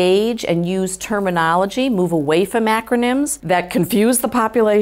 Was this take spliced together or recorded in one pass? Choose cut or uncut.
cut